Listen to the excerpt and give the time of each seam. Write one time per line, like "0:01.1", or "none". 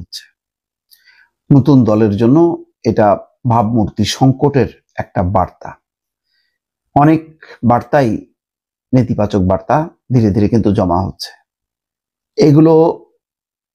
none